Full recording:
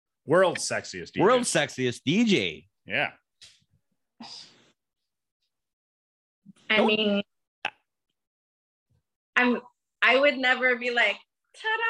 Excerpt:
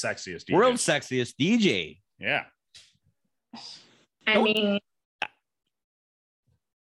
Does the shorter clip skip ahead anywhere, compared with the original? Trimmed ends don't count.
yes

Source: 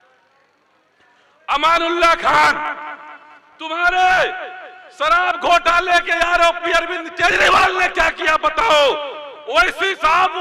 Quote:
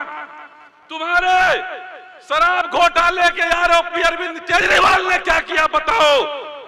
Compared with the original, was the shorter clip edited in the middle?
no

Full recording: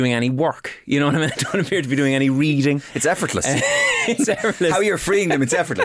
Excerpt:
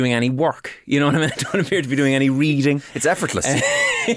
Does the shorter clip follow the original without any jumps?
yes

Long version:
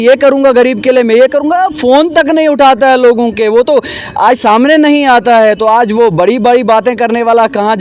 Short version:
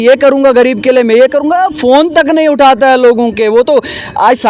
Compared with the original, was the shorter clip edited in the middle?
no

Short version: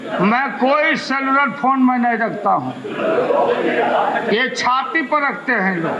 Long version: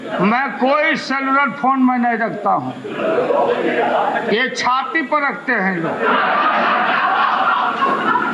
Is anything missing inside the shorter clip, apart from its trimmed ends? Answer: no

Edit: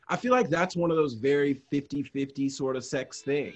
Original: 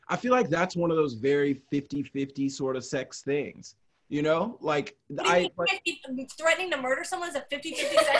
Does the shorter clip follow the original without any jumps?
yes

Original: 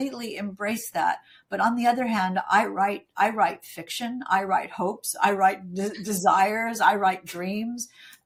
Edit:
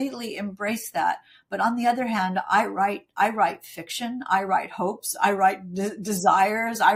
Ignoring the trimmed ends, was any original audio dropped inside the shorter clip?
no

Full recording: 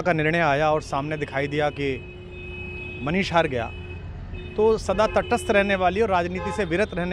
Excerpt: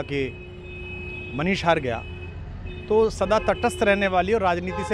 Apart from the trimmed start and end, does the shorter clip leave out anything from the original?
no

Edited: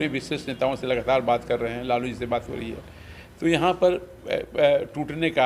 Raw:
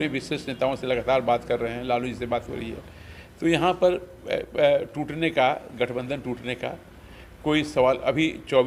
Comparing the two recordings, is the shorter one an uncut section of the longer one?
yes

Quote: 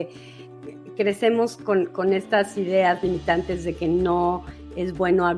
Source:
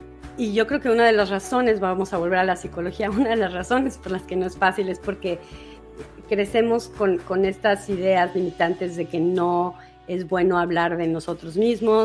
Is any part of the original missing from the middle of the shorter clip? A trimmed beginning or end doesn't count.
no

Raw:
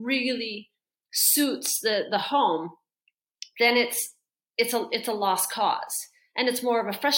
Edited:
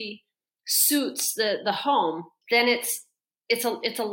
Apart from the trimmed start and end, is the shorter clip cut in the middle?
yes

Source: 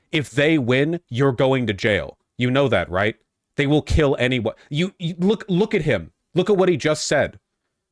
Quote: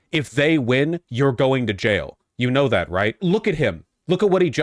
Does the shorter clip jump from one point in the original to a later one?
yes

